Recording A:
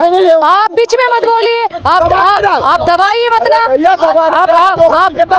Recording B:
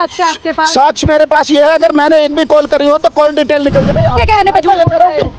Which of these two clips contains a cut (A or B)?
B